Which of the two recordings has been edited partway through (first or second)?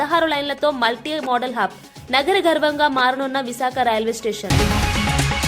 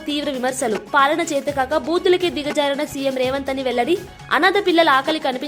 first